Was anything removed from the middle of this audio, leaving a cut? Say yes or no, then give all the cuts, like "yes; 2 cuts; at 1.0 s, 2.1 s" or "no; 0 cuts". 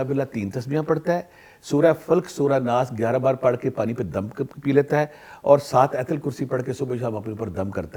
no; 0 cuts